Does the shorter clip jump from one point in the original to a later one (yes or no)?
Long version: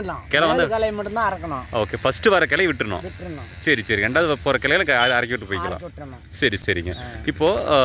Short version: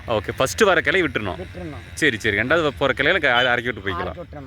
no